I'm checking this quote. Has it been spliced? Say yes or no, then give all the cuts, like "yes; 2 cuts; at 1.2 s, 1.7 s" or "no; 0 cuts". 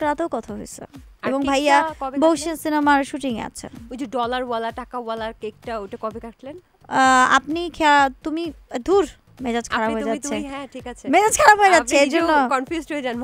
no; 0 cuts